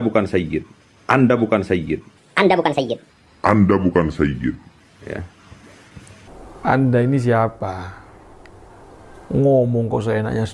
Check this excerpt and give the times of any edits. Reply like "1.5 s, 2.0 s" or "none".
6.3 s